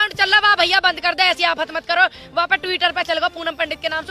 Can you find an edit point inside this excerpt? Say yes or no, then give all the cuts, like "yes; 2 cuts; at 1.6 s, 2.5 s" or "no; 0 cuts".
no; 0 cuts